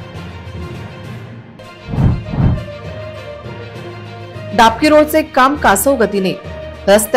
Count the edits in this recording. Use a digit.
1